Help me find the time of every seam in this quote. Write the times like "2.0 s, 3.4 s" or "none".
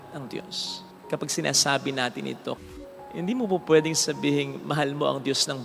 2.6 s